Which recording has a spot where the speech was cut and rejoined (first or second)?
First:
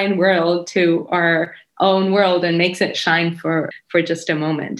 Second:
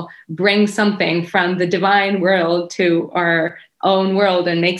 first